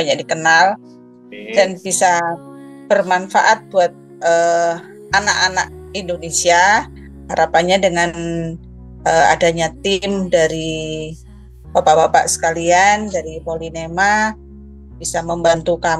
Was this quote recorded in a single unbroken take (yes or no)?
yes